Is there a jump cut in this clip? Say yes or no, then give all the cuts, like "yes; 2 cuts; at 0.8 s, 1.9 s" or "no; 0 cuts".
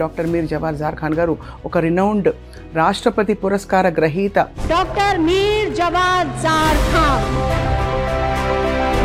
no; 0 cuts